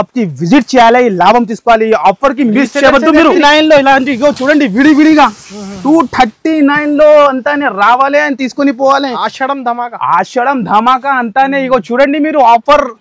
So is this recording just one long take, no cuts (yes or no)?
no